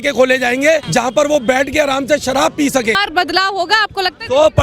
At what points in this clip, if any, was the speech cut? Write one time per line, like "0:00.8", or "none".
0:00.9
0:03.0

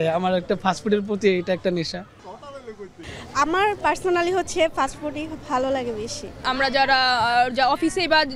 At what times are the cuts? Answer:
none

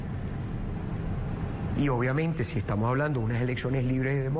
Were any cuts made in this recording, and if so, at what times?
0:02.3

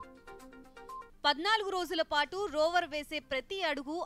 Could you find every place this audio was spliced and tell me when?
0:01.1

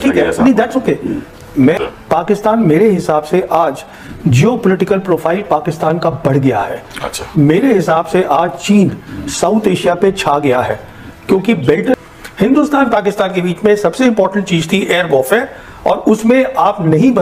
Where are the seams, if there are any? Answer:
0:01.8
0:11.9

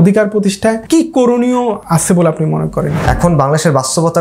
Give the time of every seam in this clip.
0:00.8
0:01.8
0:03.0

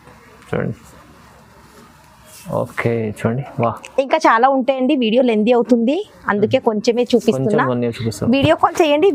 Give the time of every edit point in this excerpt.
none

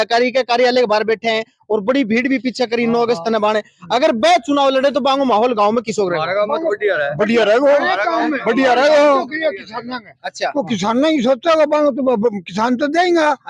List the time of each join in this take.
none

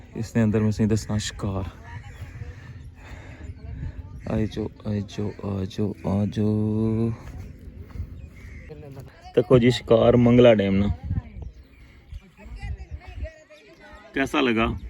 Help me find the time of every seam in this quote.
0:08.7

